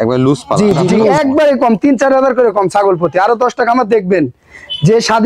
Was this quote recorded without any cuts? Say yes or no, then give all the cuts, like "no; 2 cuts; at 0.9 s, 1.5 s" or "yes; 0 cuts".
no; 1 cut; at 1.0 s